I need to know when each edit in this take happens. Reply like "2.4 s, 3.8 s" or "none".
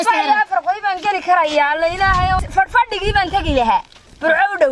2.5 s